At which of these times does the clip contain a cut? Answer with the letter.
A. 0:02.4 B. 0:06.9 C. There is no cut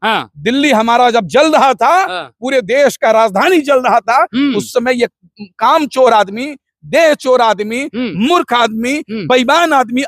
C